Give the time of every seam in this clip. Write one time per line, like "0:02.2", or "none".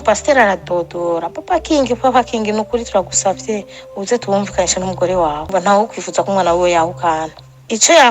0:05.5